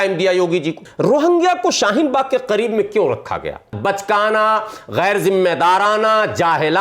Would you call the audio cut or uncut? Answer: cut